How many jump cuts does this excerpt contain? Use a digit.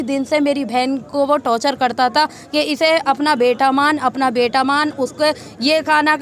0